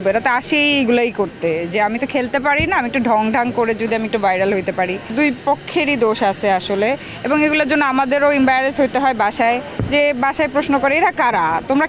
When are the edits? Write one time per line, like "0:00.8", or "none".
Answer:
none